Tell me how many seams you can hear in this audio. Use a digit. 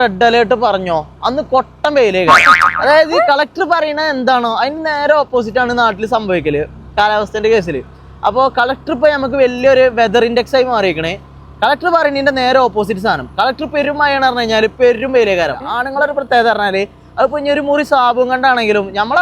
1